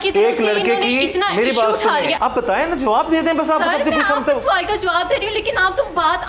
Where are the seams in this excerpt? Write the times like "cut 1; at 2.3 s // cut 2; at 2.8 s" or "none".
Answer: cut 1; at 2.2 s

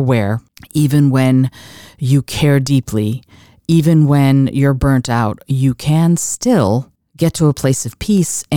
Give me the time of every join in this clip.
none

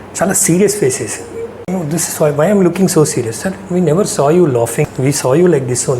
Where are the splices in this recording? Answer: cut 1; at 1.7 s // cut 2; at 4.9 s

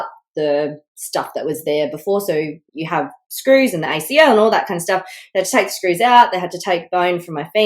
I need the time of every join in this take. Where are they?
cut 1; at 2.6 s

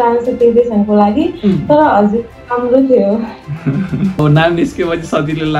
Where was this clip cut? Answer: cut 1; at 4.2 s

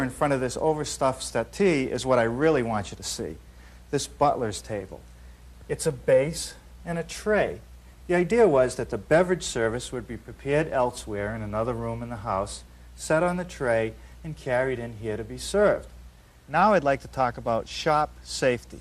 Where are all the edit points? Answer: cut 1; at 3.8 s

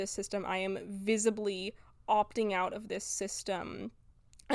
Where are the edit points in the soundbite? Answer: none

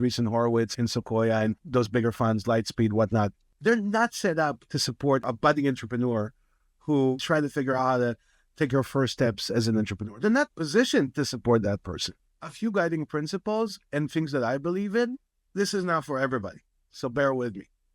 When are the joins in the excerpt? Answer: cut 1; at 3.4 s // cut 2; at 5.2 s // cut 3; at 7.2 s // cut 4; at 12.2 s

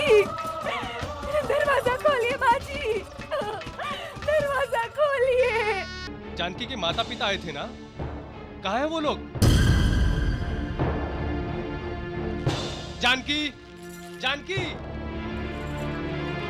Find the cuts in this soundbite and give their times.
cut 1; at 6.0 s

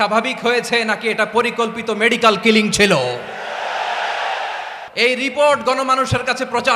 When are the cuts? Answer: cut 1; at 4.8 s

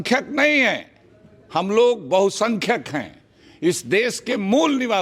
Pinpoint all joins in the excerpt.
none

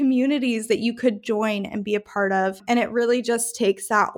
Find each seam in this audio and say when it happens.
cut 1; at 2.6 s

